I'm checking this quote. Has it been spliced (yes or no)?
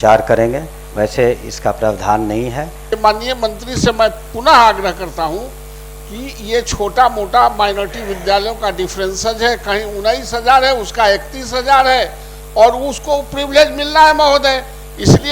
yes